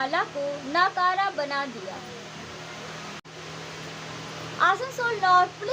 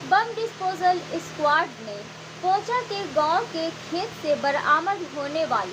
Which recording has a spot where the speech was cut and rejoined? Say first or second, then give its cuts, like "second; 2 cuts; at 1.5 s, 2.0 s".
first; 1 cut; at 3.3 s